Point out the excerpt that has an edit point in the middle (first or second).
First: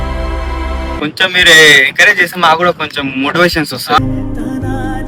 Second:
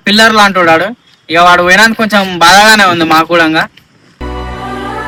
first